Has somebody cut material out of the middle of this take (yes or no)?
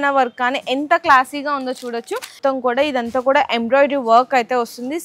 yes